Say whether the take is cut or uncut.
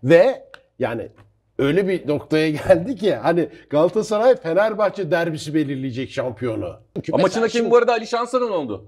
cut